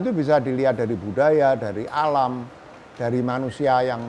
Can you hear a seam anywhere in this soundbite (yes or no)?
no